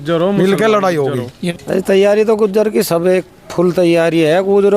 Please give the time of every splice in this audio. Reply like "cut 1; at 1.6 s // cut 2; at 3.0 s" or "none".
cut 1; at 1.4 s